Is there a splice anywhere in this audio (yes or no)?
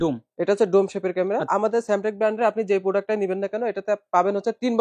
yes